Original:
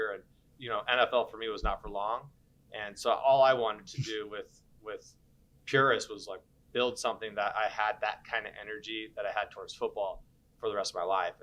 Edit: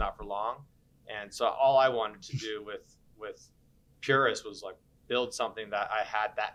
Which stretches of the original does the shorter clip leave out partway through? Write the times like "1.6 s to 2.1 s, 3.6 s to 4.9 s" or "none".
none

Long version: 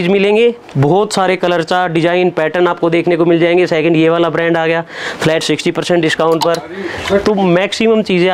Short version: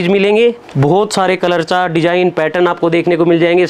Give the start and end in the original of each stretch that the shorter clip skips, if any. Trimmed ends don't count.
none

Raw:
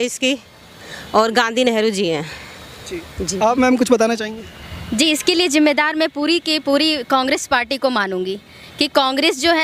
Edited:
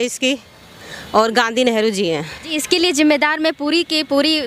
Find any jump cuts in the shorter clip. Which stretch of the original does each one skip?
2.6 s to 5.1 s

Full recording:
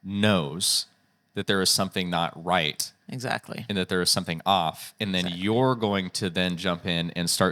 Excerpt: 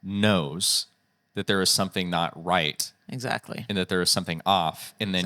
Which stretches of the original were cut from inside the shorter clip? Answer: none

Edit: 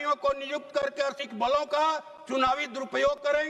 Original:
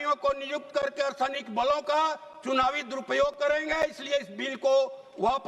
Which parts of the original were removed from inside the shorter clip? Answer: 1.1 s to 1.3 s

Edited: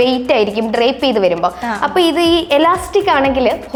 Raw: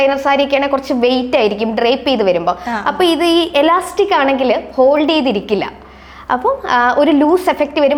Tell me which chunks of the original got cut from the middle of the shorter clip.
none

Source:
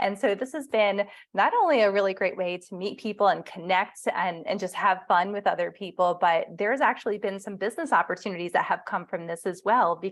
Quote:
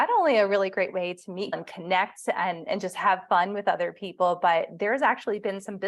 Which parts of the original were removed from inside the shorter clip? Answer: 3.0 s to 3.4 s

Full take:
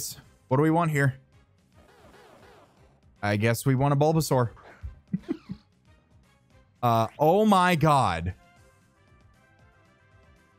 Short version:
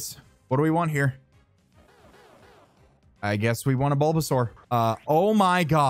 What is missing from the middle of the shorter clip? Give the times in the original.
4.6 s to 6.7 s

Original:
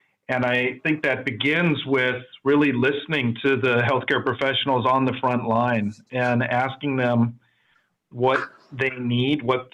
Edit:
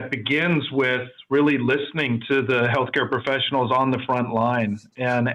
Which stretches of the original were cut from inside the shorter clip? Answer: none

